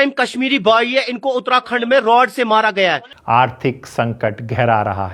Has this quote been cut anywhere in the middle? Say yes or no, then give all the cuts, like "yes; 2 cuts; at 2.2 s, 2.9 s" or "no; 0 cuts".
no; 0 cuts